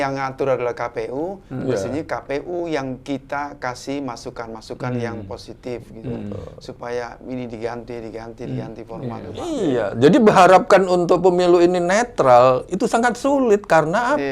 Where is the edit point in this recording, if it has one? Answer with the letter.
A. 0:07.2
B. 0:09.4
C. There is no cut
B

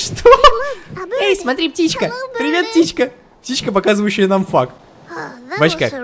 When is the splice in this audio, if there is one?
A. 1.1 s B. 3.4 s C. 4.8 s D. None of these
D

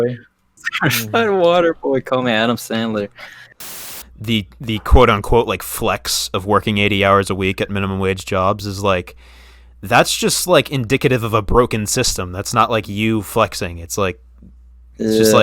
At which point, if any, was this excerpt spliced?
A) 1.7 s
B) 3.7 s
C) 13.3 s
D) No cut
B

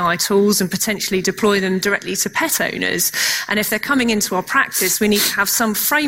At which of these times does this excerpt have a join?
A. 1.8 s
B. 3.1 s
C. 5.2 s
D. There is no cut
D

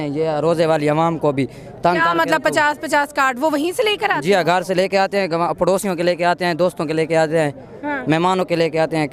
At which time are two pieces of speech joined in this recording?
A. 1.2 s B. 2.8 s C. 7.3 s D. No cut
D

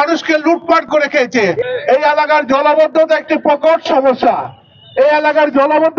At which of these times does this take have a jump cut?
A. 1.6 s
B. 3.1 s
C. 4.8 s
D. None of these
A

